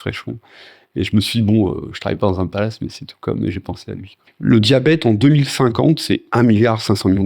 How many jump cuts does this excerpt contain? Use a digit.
2